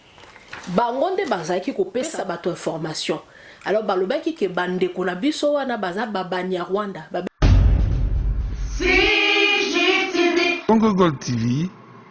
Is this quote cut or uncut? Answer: cut